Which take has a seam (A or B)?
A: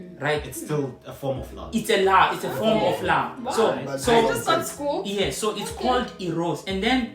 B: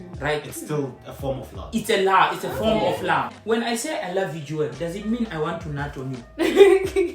B